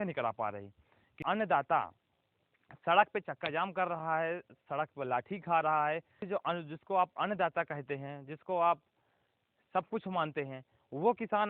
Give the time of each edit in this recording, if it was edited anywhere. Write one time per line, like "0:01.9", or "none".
0:01.2
0:06.3